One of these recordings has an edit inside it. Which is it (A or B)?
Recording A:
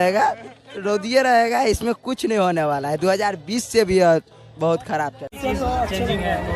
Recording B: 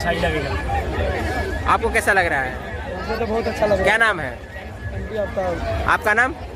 A